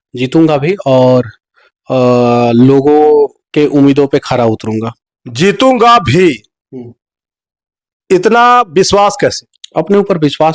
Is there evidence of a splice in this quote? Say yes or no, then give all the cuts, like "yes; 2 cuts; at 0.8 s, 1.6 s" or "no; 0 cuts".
no; 0 cuts